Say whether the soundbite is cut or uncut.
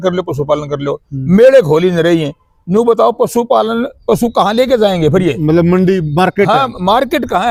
uncut